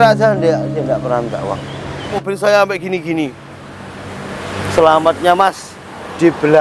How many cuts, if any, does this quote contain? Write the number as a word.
one